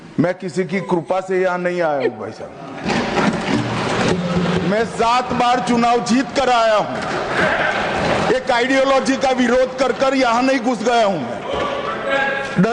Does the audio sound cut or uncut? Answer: uncut